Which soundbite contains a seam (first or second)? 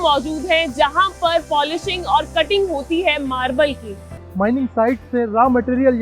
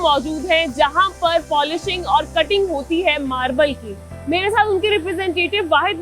first